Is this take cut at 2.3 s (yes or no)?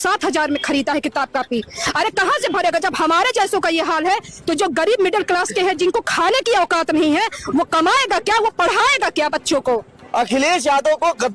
no